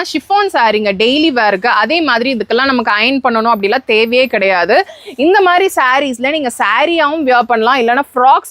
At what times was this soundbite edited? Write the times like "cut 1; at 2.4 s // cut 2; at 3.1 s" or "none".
none